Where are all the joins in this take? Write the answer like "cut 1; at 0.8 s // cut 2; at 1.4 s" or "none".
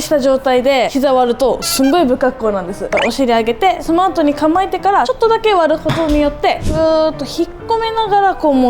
cut 1; at 0.9 s // cut 2; at 2.8 s // cut 3; at 3.8 s // cut 4; at 5.1 s // cut 5; at 6.6 s